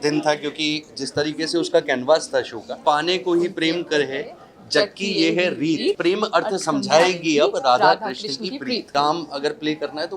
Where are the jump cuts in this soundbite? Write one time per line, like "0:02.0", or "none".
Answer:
0:02.7
0:08.9